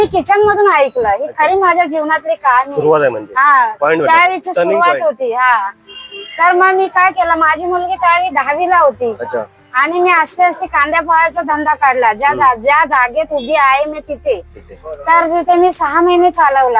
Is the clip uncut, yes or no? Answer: yes